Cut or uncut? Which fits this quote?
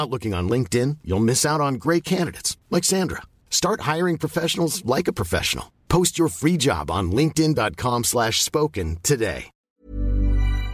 cut